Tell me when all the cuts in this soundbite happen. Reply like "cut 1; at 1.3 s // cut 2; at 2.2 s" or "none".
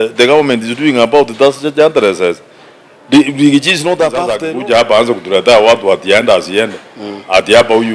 cut 1; at 4.4 s